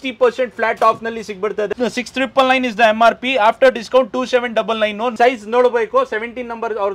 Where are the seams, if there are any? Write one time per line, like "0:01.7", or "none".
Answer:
0:01.7
0:05.1